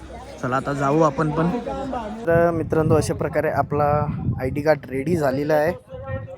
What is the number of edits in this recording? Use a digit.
1